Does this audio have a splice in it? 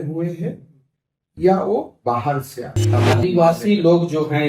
yes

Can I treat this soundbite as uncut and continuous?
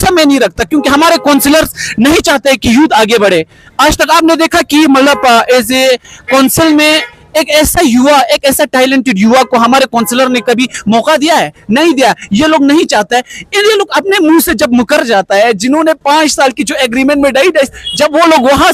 yes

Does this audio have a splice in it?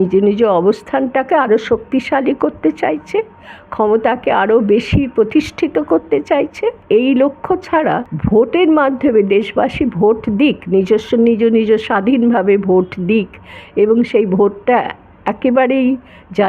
yes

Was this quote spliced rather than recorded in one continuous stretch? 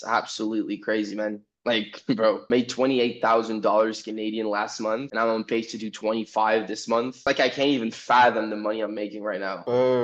no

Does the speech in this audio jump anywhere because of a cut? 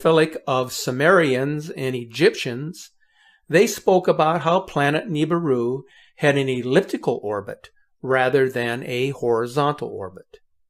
no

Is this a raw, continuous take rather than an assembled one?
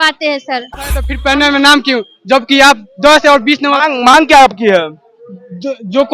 no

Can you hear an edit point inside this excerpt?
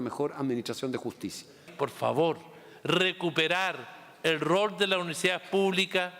yes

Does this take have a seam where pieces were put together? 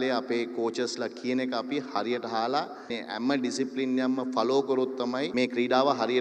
yes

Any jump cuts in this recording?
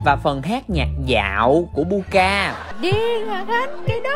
yes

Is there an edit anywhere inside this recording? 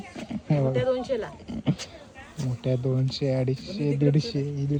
no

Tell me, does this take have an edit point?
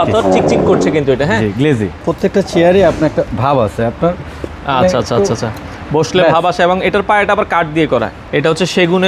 yes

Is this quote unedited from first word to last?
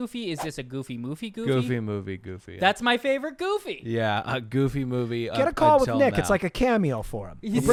yes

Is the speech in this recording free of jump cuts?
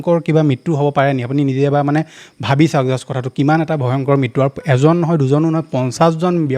yes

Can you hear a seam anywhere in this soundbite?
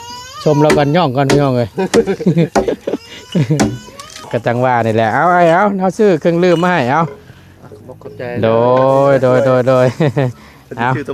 yes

